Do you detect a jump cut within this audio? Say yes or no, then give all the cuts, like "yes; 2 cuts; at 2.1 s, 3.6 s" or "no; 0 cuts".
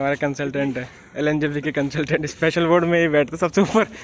no; 0 cuts